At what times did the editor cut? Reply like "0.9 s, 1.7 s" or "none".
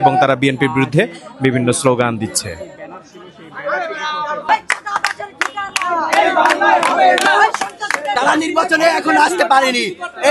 4.5 s, 8.2 s